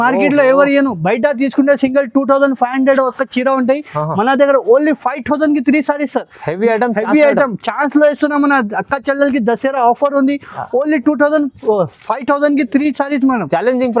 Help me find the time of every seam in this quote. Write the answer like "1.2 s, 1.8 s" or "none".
none